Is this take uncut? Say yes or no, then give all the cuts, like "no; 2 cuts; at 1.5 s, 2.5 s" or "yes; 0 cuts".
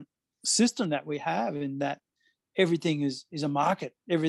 yes; 0 cuts